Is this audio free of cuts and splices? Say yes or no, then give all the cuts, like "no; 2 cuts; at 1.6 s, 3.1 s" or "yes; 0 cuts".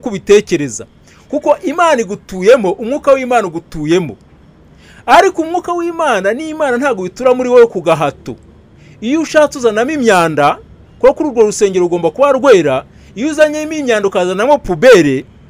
yes; 0 cuts